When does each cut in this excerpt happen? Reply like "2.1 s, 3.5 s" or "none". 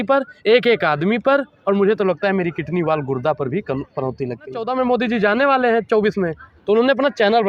4.7 s